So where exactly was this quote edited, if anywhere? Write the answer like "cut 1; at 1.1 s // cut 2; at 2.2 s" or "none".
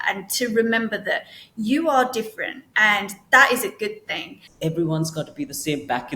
cut 1; at 4.4 s